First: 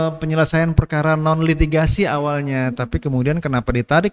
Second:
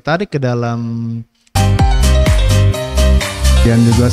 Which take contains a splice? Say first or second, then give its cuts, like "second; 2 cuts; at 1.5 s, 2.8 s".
second; 1 cut; at 1.4 s